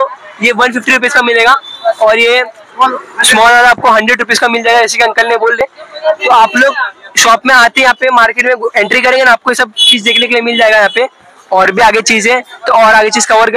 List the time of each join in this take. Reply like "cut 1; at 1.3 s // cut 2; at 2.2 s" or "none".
none